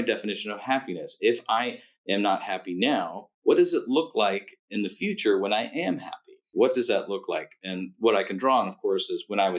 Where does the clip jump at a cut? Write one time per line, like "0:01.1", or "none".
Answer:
0:06.5

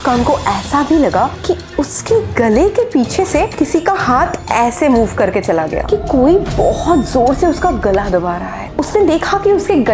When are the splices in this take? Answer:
0:05.8
0:08.7

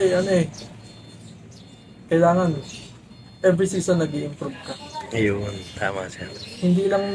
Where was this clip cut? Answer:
none

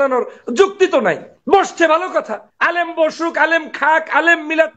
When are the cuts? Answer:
0:01.3
0:02.4

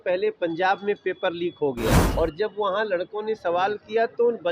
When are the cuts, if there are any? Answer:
0:02.0

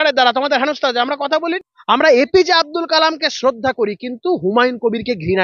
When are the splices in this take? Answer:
0:01.6

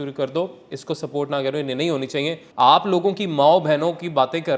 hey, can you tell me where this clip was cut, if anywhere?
0:02.4

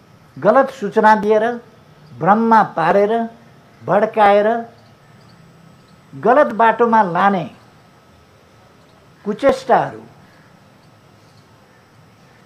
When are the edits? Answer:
none

